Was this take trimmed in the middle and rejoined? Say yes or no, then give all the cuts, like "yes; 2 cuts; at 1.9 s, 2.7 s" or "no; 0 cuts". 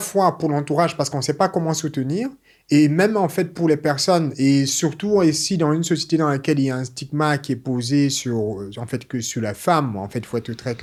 no; 0 cuts